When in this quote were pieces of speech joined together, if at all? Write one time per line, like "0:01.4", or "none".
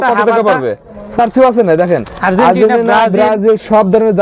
0:01.2